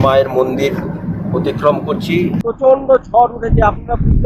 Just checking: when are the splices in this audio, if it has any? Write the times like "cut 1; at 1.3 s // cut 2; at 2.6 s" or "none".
cut 1; at 2.4 s